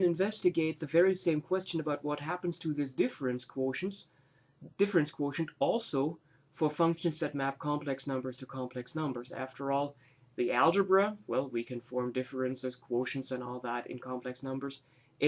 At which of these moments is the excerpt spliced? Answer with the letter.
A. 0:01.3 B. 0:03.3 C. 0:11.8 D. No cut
D